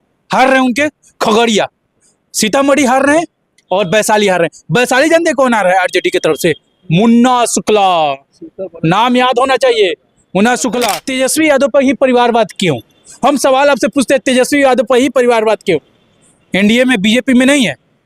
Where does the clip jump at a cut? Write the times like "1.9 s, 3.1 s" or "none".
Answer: 11.0 s